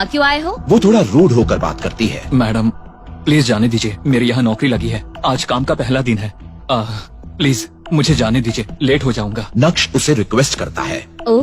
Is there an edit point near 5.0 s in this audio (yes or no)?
no